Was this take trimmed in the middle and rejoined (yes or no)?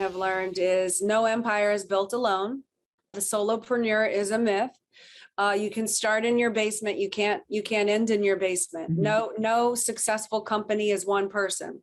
no